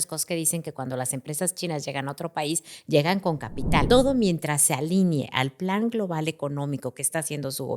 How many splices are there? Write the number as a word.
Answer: one